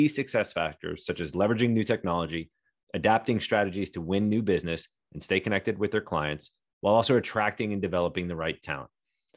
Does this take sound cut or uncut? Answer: uncut